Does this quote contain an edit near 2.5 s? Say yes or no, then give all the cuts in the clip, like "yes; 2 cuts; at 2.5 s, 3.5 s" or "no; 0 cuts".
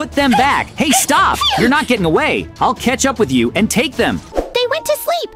no; 1 cut; at 4.2 s